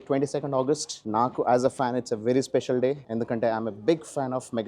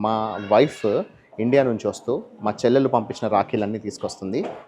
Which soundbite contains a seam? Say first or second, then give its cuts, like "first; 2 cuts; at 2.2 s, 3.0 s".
first; 2 cuts; at 0.9 s, 3.0 s